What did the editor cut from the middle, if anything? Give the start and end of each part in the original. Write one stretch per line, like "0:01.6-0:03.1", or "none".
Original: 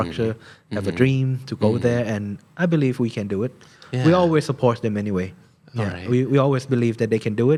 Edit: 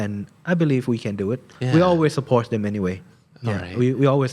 0:03.6-0:03.8

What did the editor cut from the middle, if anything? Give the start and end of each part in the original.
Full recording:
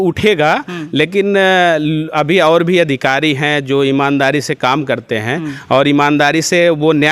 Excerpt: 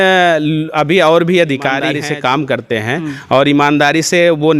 0:03.7-0:04.7

